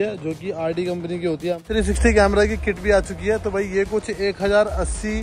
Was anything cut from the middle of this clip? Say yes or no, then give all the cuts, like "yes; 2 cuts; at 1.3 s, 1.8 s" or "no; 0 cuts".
yes; 1 cut; at 1.6 s